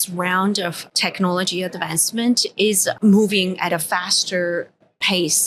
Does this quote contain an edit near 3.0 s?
yes; 2 cuts; at 0.9 s, 3.0 s

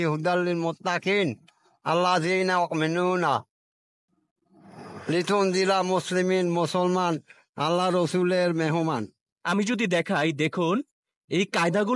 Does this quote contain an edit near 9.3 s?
yes; 1 cut; at 9.3 s

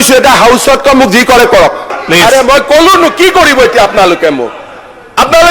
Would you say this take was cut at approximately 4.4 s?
yes; 2 cuts; at 1.9 s, 4.4 s

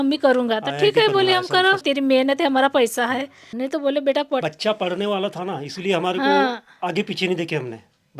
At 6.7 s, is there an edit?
no; 3 cuts; at 1.9 s, 3.4 s, 4.4 s

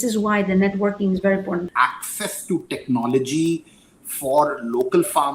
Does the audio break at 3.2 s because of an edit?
no; 1 cut; at 1.6 s

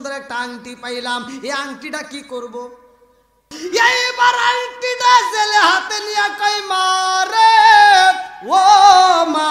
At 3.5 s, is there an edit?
yes; 1 cut; at 3.5 s

